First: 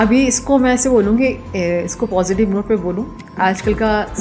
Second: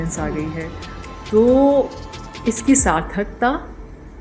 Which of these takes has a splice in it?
second; 1 cut; at 1.2 s

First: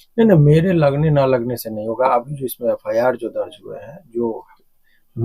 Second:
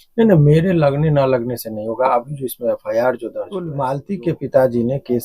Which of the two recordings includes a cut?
second; 1 cut; at 3.7 s

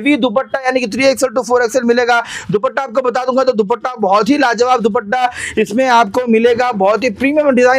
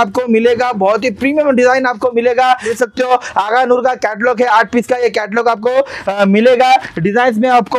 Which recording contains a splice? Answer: second; 1 cut; at 2.7 s

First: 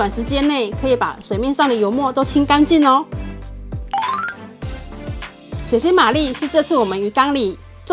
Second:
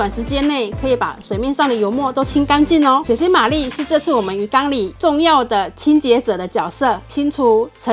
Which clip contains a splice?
second; 3 cuts; at 3.0 s, 4.9 s, 7.1 s

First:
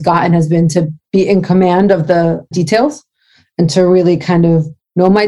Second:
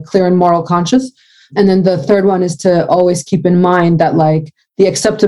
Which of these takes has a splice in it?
first; 1 cut; at 2.5 s

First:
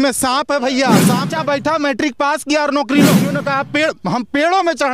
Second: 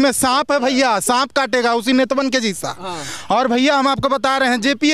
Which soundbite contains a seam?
first; 2 cuts; at 1.3 s, 3.3 s

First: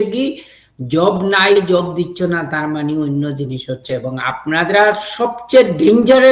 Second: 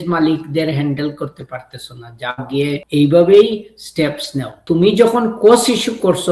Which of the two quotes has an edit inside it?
second; 2 cuts; at 2.8 s, 4.6 s

